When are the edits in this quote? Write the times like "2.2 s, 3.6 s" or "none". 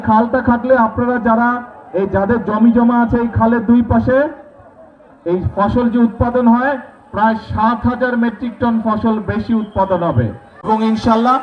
10.5 s